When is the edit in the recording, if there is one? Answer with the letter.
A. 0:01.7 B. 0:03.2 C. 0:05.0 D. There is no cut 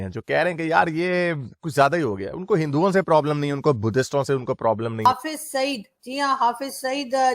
C